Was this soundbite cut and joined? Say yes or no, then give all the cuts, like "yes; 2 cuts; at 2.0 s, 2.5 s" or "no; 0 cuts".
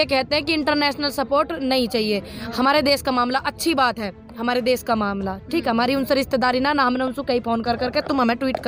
no; 0 cuts